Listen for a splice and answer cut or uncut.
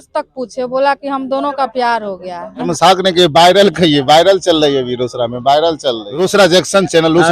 cut